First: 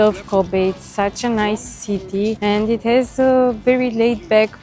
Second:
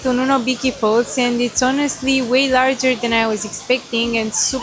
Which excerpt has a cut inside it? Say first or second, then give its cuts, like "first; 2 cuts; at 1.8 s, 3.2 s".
first; 1 cut; at 2.4 s